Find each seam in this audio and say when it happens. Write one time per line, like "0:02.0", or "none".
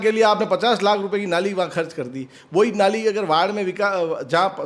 none